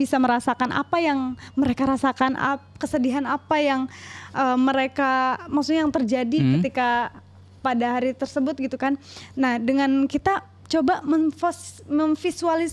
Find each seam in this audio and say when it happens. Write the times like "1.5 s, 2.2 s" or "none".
none